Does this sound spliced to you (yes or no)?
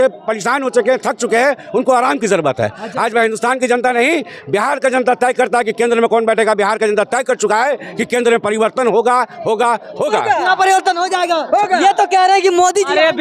no